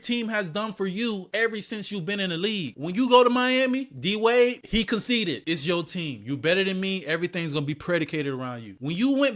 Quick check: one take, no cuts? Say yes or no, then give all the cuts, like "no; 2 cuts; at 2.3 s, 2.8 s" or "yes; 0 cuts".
yes; 0 cuts